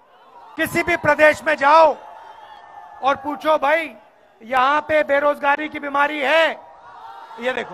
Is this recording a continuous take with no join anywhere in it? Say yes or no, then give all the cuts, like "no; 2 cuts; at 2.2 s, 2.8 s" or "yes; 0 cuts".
yes; 0 cuts